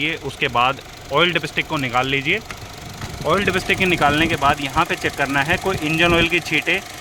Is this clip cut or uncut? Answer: uncut